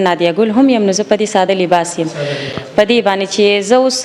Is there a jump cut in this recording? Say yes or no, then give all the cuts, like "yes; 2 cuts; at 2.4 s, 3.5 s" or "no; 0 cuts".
no; 0 cuts